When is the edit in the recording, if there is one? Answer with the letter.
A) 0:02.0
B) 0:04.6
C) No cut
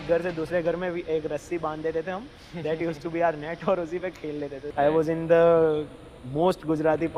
B